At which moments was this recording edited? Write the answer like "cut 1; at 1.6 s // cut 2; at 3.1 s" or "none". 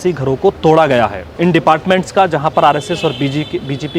cut 1; at 1.2 s